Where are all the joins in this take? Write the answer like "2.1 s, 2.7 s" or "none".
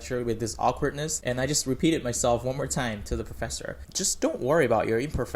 1.1 s, 3.9 s